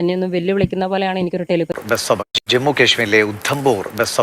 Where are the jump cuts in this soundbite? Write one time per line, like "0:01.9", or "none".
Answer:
0:01.7